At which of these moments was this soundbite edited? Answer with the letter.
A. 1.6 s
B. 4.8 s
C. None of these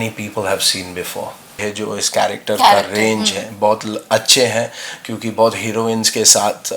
A